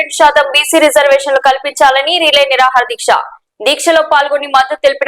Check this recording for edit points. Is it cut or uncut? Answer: uncut